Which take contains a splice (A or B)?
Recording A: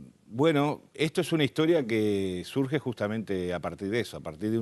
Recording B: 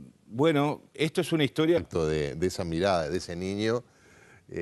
A